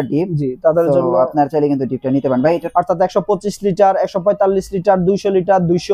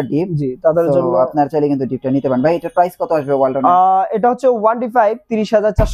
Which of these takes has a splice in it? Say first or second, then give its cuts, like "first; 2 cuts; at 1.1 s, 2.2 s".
first; 1 cut; at 2.7 s